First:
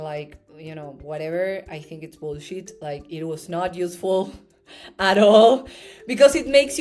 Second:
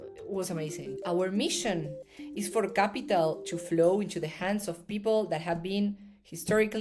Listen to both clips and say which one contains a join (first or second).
second